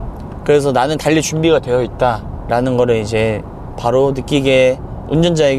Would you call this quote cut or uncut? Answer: uncut